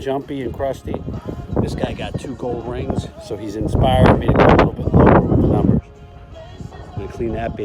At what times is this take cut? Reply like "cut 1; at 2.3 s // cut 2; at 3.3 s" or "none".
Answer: none